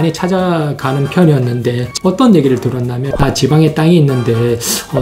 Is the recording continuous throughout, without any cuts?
no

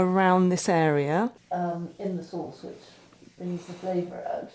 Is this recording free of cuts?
no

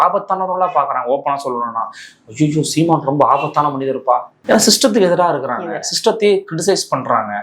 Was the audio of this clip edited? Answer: yes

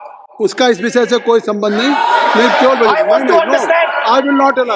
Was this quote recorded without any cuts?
yes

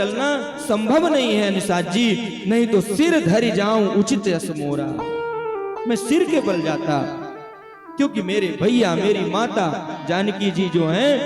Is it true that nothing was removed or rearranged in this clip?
yes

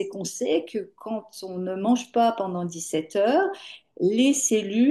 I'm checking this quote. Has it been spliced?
no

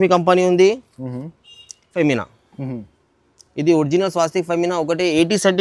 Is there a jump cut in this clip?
yes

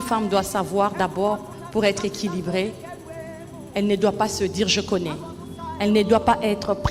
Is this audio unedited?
yes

